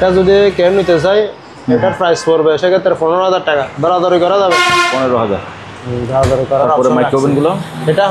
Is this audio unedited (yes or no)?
yes